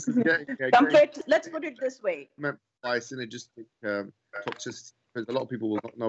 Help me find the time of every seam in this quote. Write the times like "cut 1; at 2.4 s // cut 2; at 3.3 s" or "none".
cut 1; at 1.2 s // cut 2; at 2.3 s